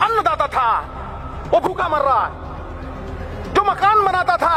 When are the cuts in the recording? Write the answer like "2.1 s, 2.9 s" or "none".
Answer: none